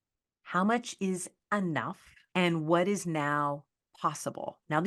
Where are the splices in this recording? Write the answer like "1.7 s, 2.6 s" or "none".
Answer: 2.2 s